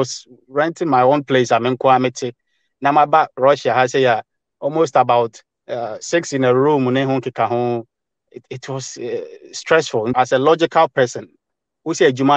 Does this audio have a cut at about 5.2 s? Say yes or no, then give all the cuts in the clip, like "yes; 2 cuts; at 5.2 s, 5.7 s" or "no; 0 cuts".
no; 1 cut; at 10.1 s